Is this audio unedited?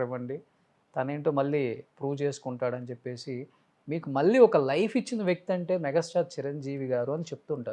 yes; 0 cuts

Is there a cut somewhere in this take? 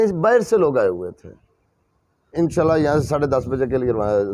yes; 1 cut; at 2.3 s

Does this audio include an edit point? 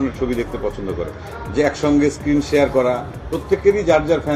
yes; 1 cut; at 1.3 s

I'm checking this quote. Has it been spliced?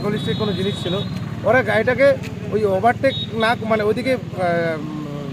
no; 0 cuts

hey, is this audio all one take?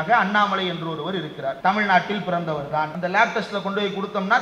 no; 2 cuts; at 1.6 s, 2.9 s

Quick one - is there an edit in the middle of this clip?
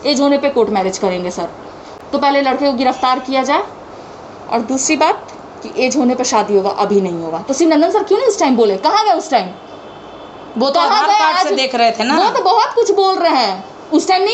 no; 0 cuts

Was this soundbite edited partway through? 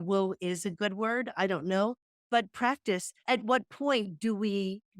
yes; 2 cuts; at 2.1 s, 3.2 s

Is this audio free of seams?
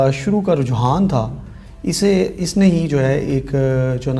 yes; 0 cuts

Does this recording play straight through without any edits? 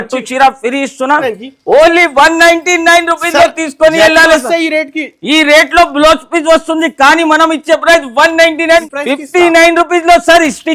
no; 2 cuts; at 1.2 s, 8.8 s

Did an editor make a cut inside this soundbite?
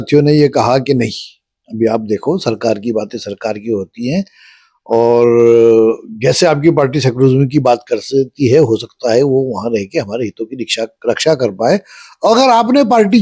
no; 0 cuts

